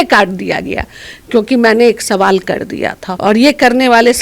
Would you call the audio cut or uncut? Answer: cut